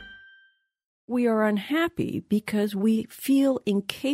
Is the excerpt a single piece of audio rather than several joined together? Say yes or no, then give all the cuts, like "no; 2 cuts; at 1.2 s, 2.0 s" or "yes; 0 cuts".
no; 1 cut; at 1.1 s